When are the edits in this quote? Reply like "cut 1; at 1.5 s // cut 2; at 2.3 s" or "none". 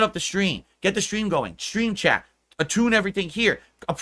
none